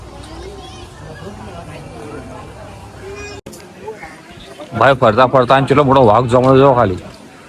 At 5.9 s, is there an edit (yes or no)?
no